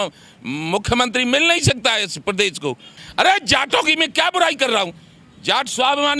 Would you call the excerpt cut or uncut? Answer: cut